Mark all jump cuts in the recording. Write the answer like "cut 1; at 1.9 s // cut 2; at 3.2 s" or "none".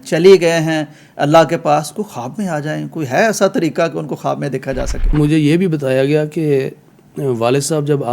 cut 1; at 5.1 s

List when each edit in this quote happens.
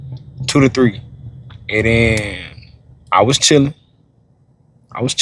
none

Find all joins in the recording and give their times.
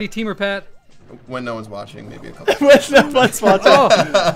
none

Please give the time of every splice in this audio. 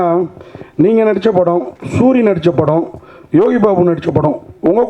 none

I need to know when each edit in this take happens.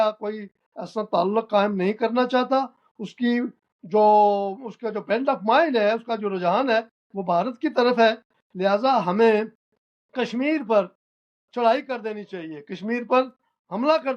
none

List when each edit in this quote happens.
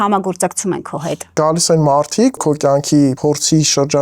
cut 1; at 1.3 s // cut 2; at 2.4 s // cut 3; at 3.2 s

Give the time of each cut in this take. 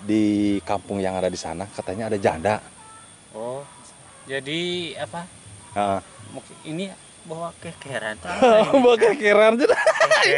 none

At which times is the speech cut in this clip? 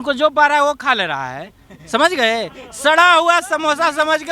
none

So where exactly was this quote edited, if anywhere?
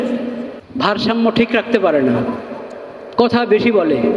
none

